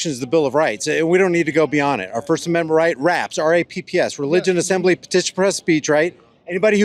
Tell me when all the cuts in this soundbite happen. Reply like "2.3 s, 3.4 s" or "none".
none